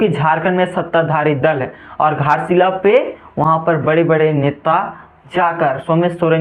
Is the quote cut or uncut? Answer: uncut